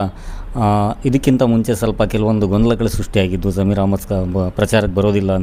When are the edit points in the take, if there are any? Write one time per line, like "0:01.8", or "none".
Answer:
none